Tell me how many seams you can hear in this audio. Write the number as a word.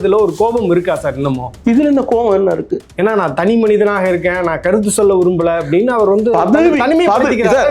two